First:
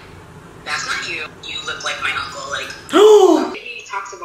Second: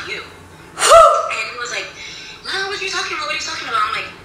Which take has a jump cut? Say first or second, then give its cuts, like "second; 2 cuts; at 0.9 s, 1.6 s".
first; 2 cuts; at 1.3 s, 3.5 s